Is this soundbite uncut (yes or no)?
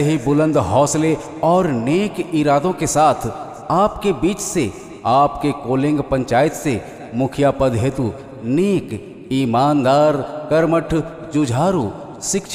yes